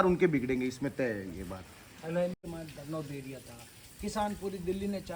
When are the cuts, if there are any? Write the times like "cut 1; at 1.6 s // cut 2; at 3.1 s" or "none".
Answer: cut 1; at 2.4 s